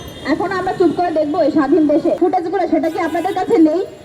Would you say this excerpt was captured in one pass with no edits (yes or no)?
no